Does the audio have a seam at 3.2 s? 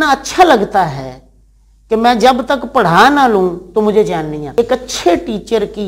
no; 1 cut; at 4.6 s

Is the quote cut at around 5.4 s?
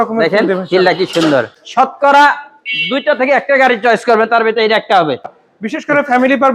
yes; 2 cuts; at 1.6 s, 5.4 s

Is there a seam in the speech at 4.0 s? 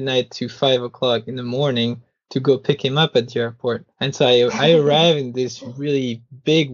yes; 1 cut; at 4.0 s

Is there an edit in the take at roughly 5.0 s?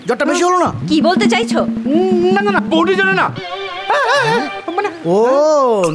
yes; 1 cut; at 5.0 s

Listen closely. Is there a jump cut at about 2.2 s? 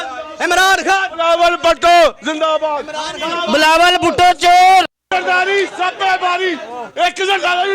no; 1 cut; at 5.1 s

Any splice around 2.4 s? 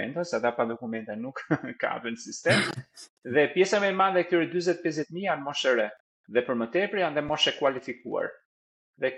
no; 0 cuts

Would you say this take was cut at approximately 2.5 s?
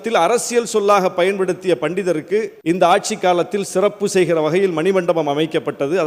yes; 1 cut; at 2.5 s

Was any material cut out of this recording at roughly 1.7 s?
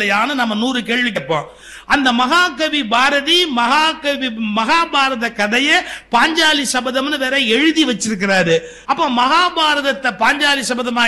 no; 1 cut; at 8.7 s

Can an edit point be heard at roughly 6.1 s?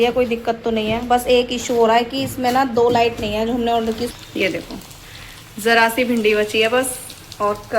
no; 1 cut; at 4.1 s

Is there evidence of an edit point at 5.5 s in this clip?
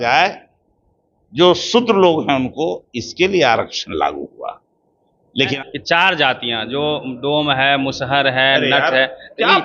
yes; 1 cut; at 5.5 s

